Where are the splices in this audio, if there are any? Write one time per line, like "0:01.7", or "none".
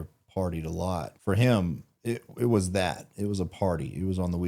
0:01.1